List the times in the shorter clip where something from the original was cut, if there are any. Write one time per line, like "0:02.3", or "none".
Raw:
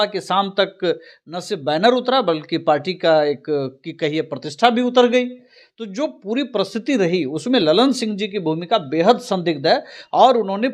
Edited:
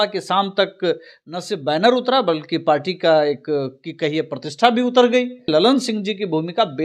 0:05.5